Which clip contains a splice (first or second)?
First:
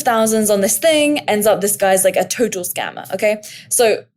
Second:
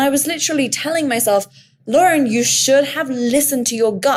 first